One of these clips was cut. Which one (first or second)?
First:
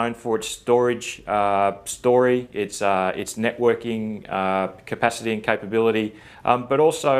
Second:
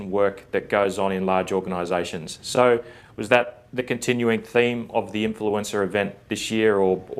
second